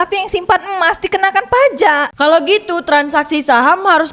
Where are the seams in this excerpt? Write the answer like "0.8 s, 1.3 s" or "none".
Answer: 2.1 s